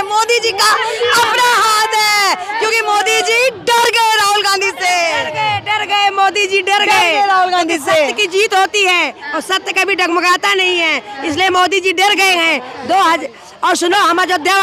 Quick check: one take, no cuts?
yes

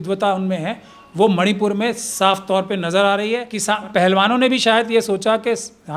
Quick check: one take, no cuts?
no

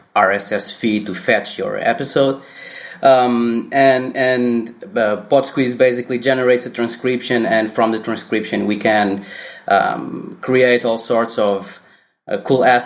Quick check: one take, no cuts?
yes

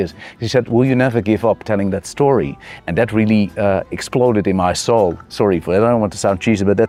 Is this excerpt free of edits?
yes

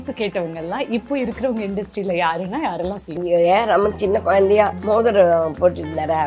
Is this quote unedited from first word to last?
no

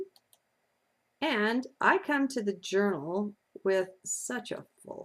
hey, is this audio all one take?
no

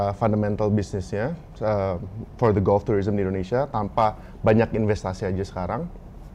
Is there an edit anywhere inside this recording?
no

